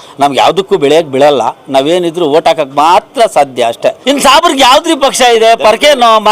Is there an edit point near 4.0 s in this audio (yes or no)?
yes